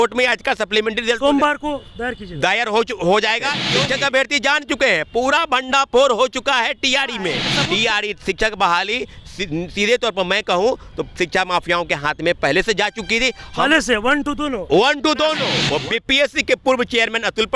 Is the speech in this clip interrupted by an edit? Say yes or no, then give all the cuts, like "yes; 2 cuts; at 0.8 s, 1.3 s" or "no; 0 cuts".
yes; 3 cuts; at 3.6 s, 7.5 s, 15.5 s